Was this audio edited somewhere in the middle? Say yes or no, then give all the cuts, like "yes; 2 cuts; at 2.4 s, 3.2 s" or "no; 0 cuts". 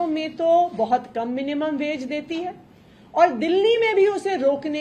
no; 0 cuts